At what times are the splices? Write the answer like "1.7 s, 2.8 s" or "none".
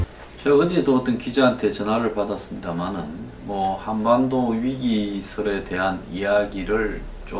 none